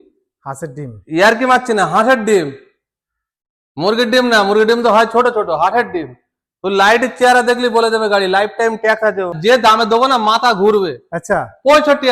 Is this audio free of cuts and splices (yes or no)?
no